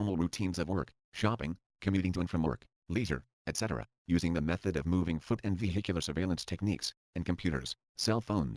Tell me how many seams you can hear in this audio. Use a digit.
0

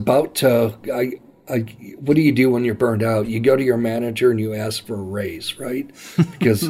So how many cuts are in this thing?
0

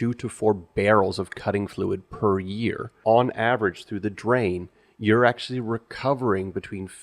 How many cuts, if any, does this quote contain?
1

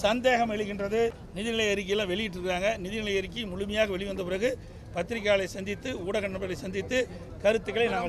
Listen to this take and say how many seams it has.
1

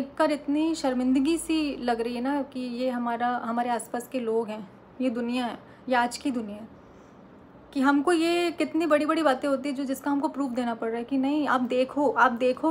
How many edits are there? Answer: 0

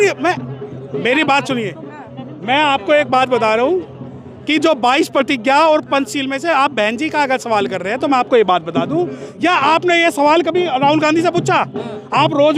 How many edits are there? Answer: 1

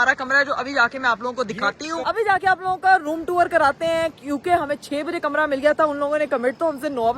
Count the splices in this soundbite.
0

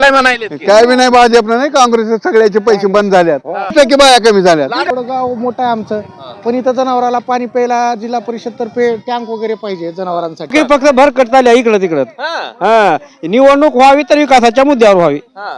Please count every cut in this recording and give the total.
3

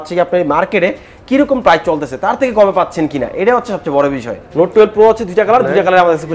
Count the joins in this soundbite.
1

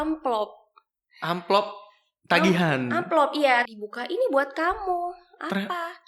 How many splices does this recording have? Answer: 1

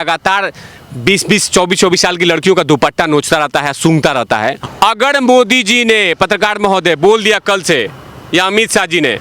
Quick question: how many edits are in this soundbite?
1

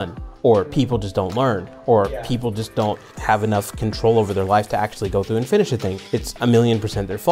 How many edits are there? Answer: 2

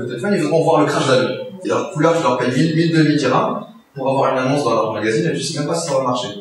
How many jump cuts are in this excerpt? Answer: 1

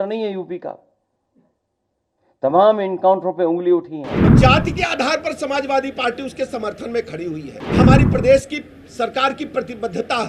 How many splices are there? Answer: 2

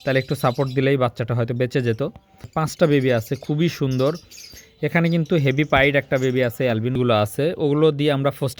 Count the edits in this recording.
2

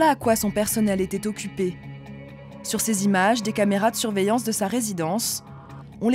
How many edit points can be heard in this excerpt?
0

